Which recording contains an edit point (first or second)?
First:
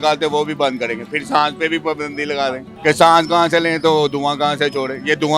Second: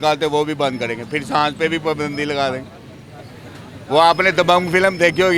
first